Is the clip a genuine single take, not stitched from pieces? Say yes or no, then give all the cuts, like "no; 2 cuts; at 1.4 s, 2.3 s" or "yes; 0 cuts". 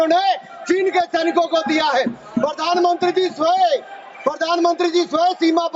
yes; 0 cuts